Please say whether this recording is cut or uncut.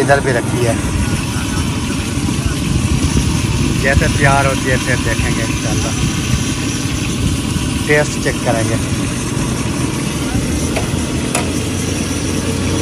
uncut